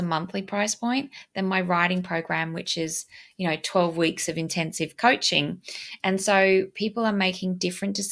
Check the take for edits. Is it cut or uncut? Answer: uncut